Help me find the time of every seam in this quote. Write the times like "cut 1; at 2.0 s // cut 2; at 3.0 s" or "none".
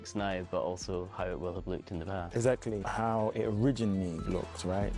cut 1; at 2.8 s